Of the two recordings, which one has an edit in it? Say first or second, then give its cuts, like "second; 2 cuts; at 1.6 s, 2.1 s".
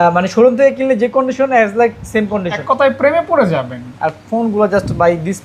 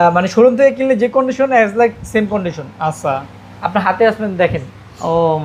first; 1 cut; at 2.5 s